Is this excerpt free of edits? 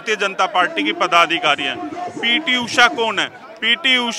yes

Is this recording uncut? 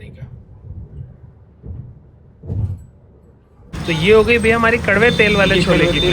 no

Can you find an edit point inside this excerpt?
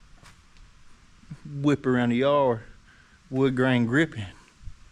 no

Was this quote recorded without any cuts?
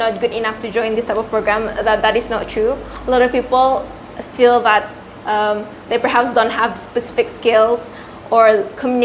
yes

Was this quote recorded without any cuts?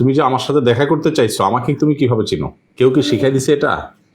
yes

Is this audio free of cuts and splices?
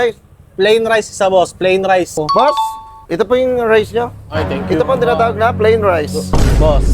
no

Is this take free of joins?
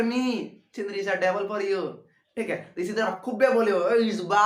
no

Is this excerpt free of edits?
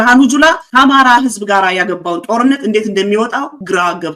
yes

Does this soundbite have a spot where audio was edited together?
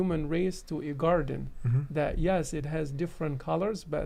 no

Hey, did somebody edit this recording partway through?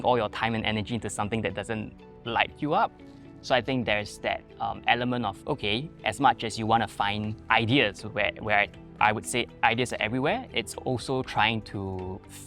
no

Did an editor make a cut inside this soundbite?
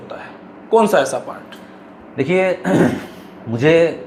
no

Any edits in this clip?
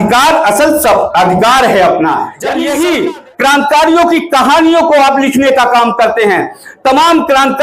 yes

